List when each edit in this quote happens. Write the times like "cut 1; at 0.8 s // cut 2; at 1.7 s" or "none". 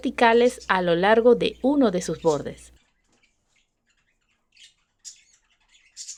none